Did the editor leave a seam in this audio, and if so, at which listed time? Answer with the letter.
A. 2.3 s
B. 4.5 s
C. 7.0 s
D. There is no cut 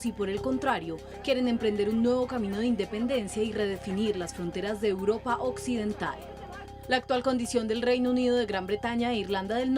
D